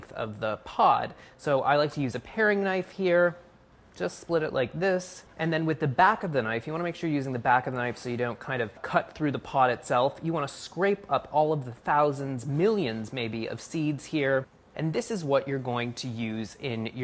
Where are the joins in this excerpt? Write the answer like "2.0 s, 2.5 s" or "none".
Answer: 13.2 s